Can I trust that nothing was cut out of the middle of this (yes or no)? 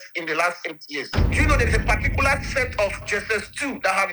no